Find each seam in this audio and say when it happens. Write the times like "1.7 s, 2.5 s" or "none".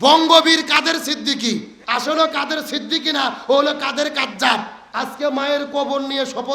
1.8 s, 4.8 s